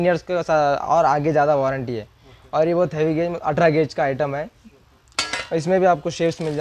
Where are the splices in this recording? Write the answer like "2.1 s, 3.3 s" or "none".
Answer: none